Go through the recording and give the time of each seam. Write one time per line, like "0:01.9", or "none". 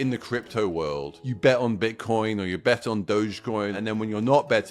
0:01.2
0:03.8